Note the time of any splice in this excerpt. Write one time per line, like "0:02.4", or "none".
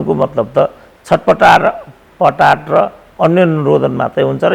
none